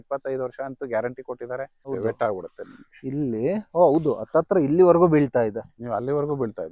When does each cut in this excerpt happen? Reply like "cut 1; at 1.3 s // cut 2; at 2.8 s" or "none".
cut 1; at 1.9 s